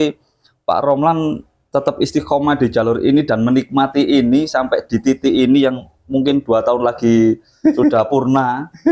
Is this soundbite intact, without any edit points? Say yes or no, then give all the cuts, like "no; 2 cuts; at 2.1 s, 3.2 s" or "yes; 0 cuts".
yes; 0 cuts